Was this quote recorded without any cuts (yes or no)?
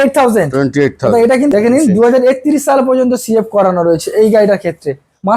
no